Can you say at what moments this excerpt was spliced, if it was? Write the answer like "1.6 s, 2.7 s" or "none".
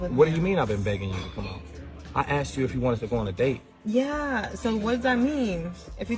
2.0 s, 3.9 s